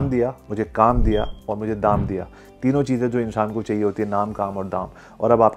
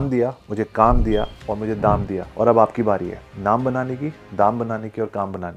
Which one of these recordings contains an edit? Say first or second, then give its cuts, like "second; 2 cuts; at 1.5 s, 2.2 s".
second; 1 cut; at 2.3 s